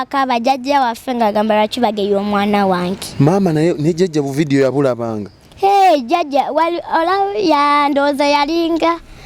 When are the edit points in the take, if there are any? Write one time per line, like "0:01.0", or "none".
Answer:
none